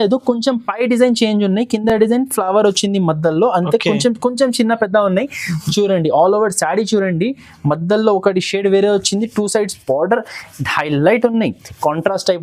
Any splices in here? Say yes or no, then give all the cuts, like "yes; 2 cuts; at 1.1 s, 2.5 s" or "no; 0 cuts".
no; 0 cuts